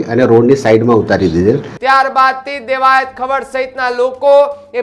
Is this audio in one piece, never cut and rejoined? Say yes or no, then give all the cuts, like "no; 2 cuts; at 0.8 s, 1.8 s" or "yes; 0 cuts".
no; 1 cut; at 1.7 s